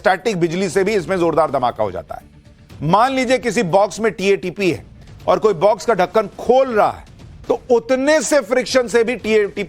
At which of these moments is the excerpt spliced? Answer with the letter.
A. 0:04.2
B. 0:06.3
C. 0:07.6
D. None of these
B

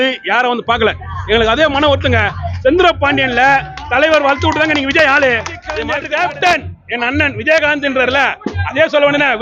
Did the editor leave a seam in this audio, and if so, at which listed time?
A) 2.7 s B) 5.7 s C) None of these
B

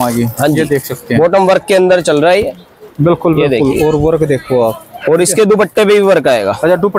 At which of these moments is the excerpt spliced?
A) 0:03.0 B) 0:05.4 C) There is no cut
C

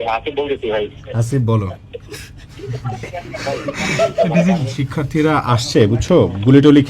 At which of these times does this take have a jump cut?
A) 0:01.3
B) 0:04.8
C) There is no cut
B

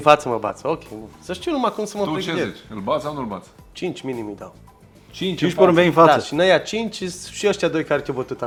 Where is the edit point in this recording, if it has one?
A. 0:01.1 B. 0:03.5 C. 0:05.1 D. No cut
D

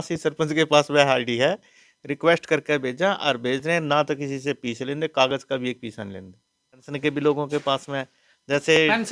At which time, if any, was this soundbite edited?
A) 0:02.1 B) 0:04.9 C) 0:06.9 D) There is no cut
C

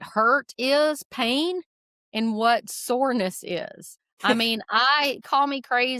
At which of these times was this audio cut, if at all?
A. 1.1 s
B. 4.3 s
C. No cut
B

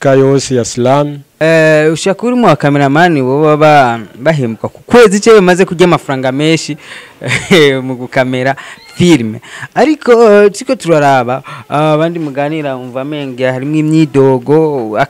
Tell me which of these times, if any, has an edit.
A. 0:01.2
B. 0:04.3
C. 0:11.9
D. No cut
A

